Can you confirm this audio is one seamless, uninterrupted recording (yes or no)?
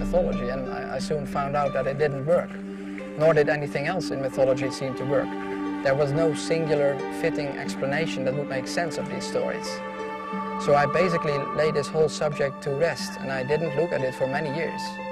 yes